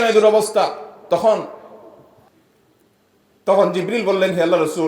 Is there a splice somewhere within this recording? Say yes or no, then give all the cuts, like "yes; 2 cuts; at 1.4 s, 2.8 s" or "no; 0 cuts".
yes; 1 cut; at 2.3 s